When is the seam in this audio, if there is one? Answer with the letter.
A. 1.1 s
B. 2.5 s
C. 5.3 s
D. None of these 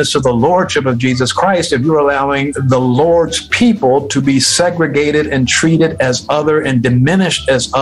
B